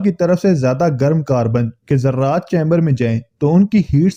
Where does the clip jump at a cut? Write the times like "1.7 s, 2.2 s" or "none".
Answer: none

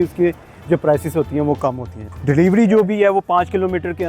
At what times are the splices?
2.1 s

